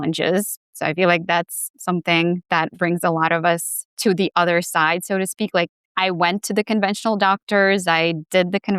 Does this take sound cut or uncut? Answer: cut